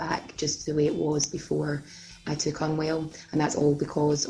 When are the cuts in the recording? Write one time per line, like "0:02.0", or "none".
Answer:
0:02.2